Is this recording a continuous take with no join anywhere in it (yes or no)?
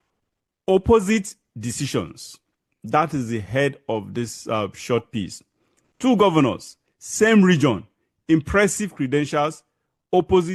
yes